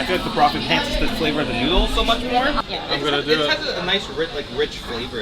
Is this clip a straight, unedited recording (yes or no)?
no